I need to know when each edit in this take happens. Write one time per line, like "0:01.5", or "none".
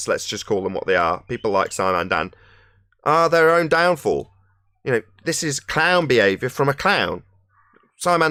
none